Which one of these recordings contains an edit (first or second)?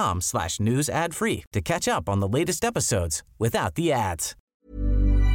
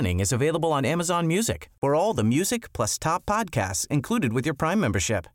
first